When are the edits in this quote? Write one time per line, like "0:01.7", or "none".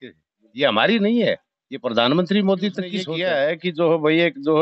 0:03.1